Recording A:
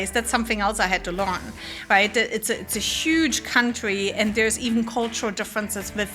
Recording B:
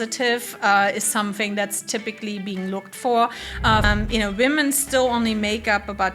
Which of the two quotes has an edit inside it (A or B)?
B